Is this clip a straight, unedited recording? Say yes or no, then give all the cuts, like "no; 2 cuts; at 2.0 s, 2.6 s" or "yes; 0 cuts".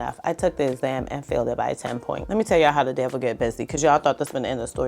no; 1 cut; at 2.2 s